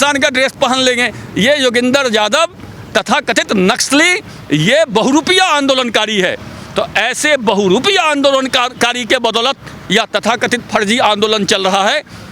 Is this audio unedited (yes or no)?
yes